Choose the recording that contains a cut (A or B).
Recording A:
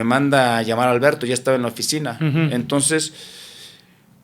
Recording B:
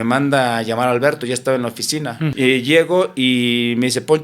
B